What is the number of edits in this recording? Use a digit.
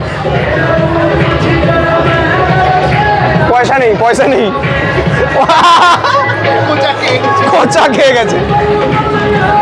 0